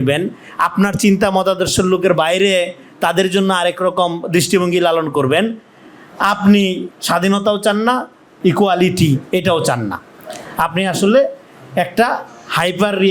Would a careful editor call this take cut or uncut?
cut